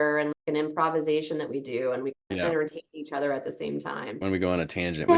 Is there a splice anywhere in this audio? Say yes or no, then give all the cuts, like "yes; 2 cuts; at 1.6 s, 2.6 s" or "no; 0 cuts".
yes; 1 cut; at 4.2 s